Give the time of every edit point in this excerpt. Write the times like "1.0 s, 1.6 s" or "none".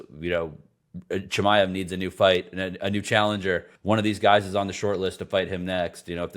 3.7 s